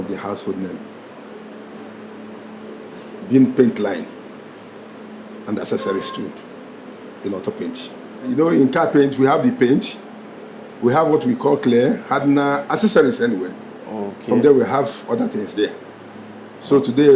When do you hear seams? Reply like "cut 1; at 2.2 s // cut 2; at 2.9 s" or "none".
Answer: none

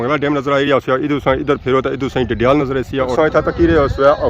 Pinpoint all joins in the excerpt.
cut 1; at 3.1 s

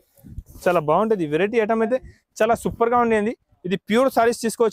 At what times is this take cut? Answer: none

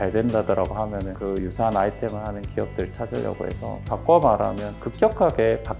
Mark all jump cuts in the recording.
cut 1; at 3.8 s

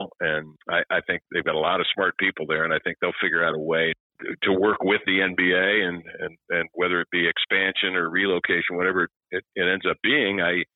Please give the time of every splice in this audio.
none

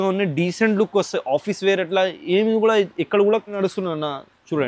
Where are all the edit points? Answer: cut 1; at 3.6 s

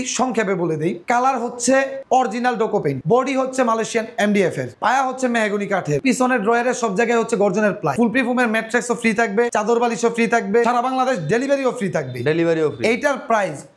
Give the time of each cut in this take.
none

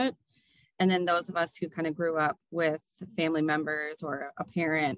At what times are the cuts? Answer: none

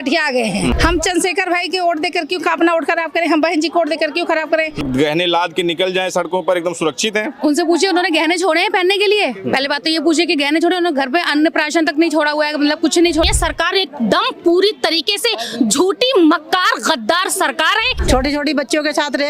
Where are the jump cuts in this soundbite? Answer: cut 1; at 0.7 s // cut 2; at 4.8 s // cut 3; at 13.3 s // cut 4; at 18.0 s

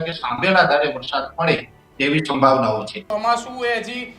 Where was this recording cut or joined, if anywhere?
cut 1; at 3.0 s

